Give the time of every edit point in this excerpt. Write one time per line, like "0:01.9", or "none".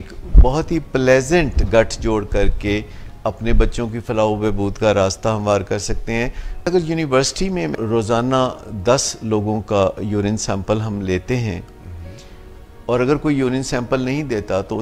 0:06.7
0:07.7